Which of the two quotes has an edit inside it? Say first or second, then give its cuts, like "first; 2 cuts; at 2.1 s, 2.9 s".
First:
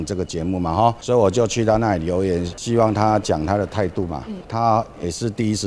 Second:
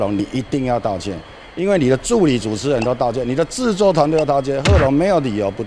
first; 3 cuts; at 1.0 s, 2.5 s, 4.4 s